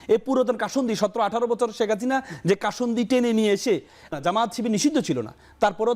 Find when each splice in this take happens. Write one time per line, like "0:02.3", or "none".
0:04.1